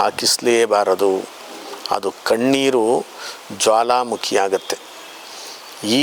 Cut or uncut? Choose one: uncut